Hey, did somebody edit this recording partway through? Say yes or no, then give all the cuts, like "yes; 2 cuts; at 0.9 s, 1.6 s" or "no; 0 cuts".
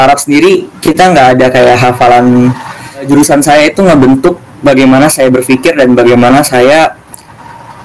yes; 1 cut; at 3.1 s